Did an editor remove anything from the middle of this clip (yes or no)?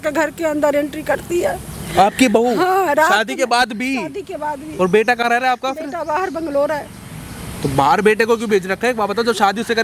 no